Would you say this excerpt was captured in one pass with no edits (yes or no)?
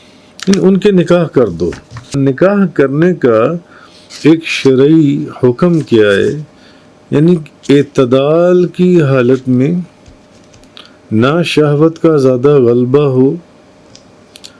no